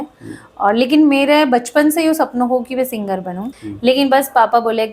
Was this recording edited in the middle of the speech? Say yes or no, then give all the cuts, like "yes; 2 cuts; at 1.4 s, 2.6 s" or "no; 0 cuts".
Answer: yes; 1 cut; at 3.4 s